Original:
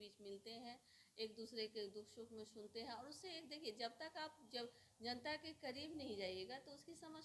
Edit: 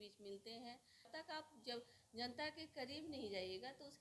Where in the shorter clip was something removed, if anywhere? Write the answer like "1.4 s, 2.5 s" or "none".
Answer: 1.1 s